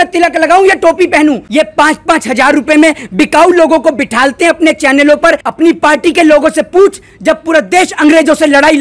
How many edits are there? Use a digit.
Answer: 2